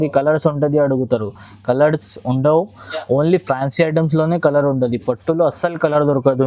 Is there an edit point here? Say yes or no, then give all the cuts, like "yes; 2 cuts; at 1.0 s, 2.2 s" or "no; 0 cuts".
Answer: no; 0 cuts